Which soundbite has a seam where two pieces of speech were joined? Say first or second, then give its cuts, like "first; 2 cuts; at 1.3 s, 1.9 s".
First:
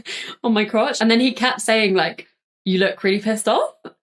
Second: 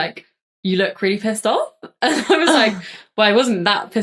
first; 1 cut; at 0.9 s